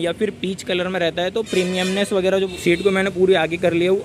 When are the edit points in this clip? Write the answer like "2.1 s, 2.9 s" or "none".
2.5 s